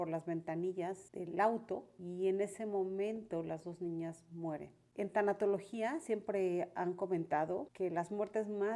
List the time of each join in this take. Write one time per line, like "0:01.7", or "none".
0:01.1
0:02.0
0:04.8
0:07.7